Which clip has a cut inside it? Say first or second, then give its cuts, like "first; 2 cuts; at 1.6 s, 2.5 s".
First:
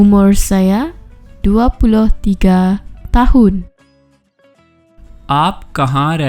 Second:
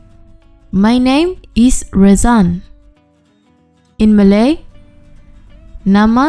first; 2 cuts; at 3.7 s, 5.2 s